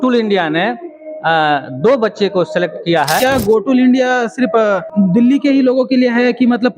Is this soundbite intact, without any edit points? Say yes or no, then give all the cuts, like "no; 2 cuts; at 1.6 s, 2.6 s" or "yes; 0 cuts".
no; 2 cuts; at 3.2 s, 4.9 s